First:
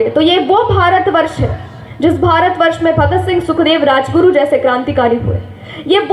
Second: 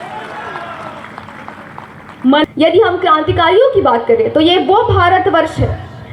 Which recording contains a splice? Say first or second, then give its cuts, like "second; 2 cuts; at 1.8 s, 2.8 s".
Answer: second; 1 cut; at 2.4 s